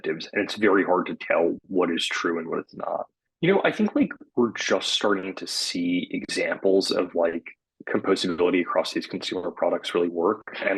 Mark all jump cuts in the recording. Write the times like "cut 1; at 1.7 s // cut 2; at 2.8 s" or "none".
cut 1; at 3.2 s